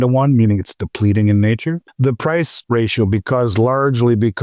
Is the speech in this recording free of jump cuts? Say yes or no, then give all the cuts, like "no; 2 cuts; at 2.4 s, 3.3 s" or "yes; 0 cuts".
no; 2 cuts; at 1.9 s, 2.6 s